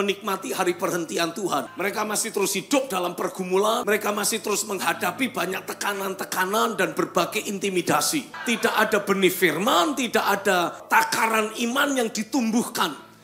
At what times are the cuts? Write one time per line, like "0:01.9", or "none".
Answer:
0:01.7
0:03.8
0:08.3
0:10.8